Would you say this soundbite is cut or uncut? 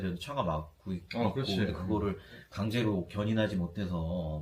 uncut